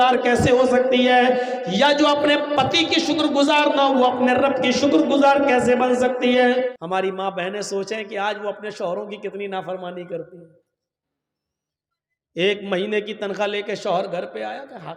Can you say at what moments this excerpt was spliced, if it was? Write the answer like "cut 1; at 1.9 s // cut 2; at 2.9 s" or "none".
cut 1; at 6.8 s